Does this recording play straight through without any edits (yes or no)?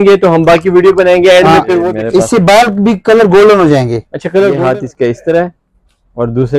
no